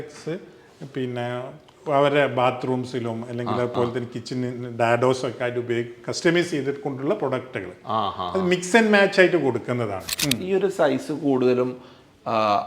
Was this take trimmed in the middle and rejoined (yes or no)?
yes